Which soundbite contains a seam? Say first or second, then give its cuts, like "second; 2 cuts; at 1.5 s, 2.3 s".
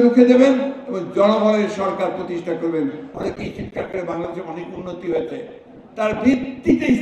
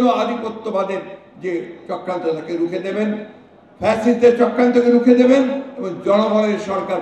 first; 1 cut; at 3.1 s